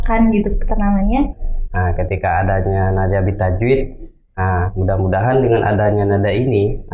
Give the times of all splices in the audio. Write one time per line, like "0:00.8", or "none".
0:01.5